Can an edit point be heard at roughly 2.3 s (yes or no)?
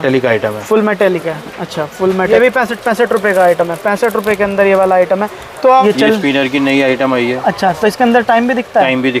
yes